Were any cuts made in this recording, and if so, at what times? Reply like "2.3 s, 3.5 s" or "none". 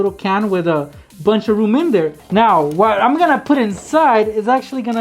2.2 s